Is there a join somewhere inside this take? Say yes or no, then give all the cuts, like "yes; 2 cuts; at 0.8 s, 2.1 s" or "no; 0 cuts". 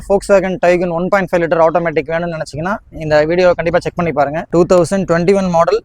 yes; 1 cut; at 4.4 s